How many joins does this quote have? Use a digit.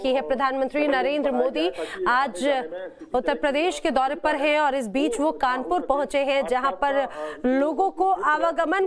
0